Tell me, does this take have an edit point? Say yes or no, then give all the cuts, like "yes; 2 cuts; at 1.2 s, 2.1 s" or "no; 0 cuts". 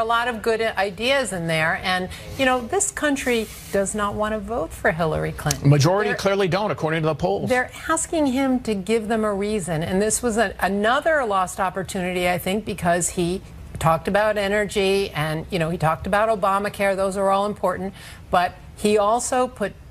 no; 0 cuts